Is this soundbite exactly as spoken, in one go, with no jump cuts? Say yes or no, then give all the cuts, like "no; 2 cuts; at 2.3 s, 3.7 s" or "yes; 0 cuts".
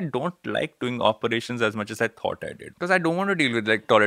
no; 1 cut; at 2.6 s